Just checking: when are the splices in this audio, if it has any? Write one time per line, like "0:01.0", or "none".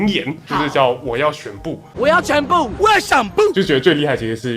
0:01.9
0:03.5

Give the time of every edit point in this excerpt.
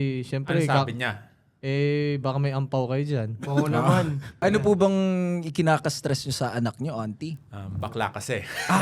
0:04.3

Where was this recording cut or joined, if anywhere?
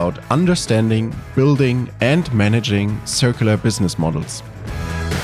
none

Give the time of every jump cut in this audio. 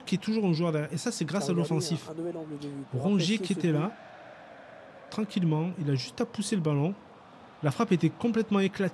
none

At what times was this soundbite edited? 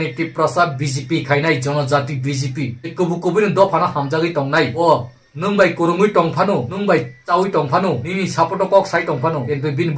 none

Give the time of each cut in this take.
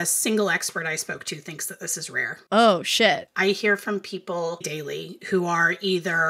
0:03.3
0:04.7

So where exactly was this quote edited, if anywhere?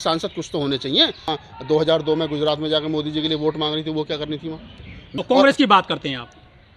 0:01.3
0:05.1

